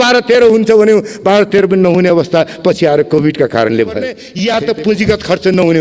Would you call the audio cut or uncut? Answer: cut